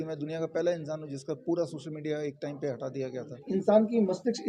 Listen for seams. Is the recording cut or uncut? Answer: cut